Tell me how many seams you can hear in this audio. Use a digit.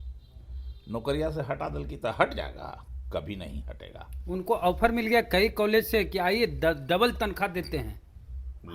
0